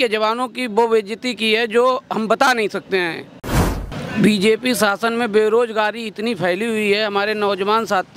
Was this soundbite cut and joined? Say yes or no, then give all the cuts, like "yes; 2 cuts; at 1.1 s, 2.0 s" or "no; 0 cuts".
yes; 1 cut; at 3.9 s